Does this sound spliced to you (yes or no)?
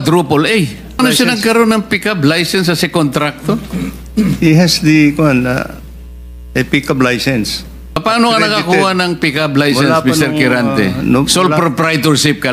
yes